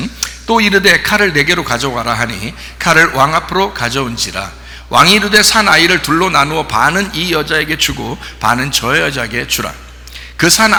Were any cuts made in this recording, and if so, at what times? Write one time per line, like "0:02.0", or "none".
none